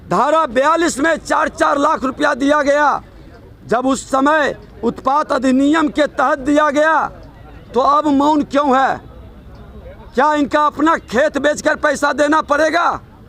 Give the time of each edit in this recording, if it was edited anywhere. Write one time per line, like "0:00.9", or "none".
none